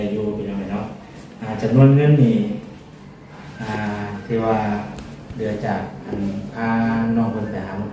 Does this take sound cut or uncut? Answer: uncut